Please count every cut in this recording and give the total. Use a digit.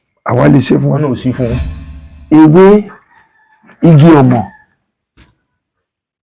1